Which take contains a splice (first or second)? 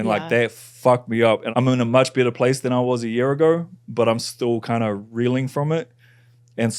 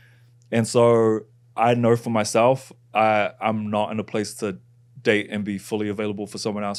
first